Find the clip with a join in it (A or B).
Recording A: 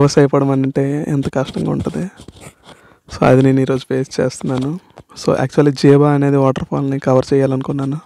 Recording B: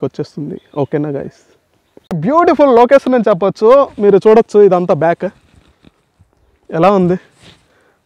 B